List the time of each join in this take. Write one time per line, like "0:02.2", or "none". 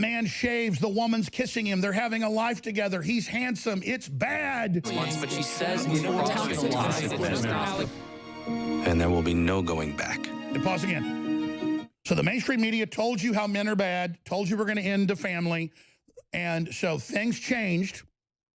0:04.9